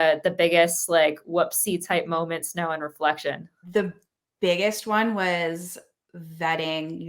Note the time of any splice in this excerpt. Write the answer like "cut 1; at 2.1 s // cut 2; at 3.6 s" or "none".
cut 1; at 3.6 s